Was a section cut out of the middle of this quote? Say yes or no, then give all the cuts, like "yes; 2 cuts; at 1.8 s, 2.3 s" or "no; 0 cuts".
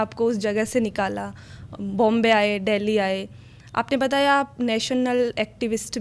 no; 0 cuts